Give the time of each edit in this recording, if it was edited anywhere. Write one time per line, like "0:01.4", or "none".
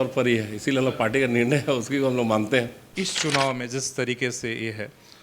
0:02.8